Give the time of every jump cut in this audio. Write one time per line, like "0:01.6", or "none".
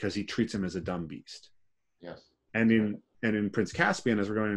none